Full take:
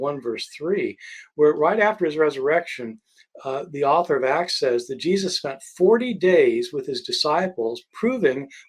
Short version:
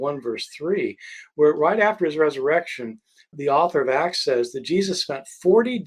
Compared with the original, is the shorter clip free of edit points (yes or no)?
no